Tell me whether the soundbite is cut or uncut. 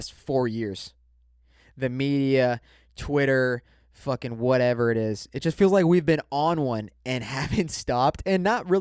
uncut